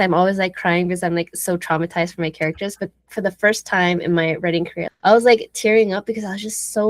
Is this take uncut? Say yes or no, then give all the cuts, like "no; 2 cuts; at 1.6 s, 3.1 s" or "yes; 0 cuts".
no; 2 cuts; at 3.1 s, 4.8 s